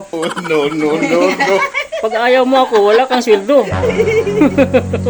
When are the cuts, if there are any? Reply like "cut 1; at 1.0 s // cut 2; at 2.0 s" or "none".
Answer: none